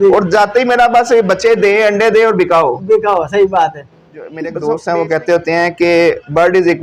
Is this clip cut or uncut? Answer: cut